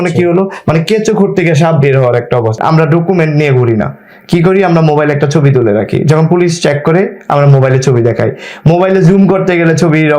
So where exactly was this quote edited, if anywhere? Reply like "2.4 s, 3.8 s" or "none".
2.6 s